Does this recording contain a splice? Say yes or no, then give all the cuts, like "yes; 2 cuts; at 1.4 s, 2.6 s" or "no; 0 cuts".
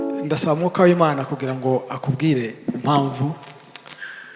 no; 0 cuts